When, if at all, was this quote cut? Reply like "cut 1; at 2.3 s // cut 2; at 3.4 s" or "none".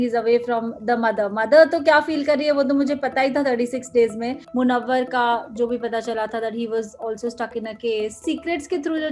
cut 1; at 4.4 s // cut 2; at 8.2 s